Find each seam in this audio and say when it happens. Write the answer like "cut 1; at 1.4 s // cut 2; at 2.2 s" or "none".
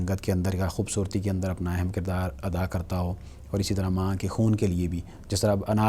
none